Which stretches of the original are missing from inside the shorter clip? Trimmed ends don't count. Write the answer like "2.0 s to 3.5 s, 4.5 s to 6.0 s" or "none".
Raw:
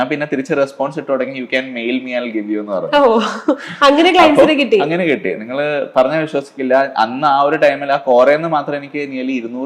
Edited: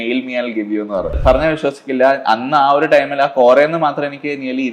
2.9 s to 5.8 s